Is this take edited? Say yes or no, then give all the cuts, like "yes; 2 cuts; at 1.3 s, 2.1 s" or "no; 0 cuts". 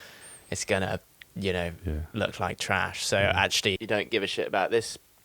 yes; 1 cut; at 3.8 s